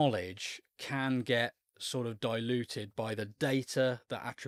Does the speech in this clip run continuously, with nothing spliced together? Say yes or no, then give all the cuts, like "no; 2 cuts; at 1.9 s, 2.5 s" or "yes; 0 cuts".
yes; 0 cuts